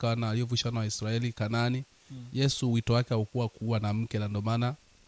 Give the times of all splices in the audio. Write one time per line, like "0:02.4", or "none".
none